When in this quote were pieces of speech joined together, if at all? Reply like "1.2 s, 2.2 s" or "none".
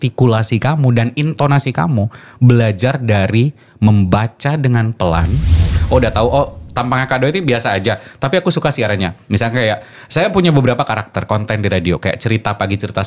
5.7 s